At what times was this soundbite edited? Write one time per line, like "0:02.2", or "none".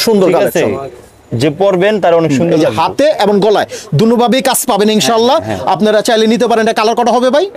none